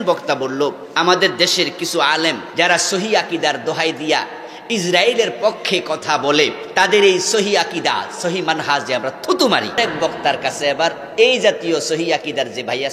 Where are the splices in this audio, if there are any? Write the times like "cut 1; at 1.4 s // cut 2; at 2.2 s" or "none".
cut 1; at 0.8 s // cut 2; at 2.4 s // cut 3; at 6.6 s // cut 4; at 9.8 s